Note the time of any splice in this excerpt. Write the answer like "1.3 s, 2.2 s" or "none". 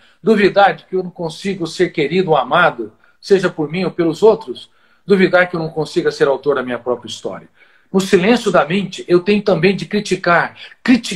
none